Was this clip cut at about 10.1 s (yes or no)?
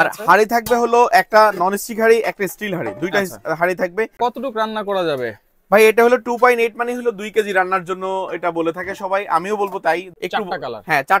yes